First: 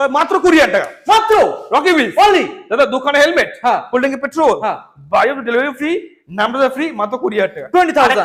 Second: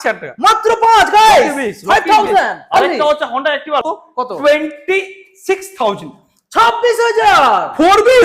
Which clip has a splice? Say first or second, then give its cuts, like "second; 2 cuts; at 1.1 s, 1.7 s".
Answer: second; 1 cut; at 3.8 s